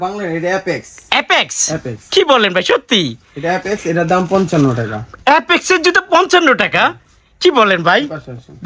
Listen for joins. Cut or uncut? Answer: uncut